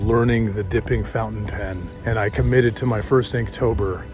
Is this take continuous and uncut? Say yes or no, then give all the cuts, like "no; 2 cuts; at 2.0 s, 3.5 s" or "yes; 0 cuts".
no; 1 cut; at 1.9 s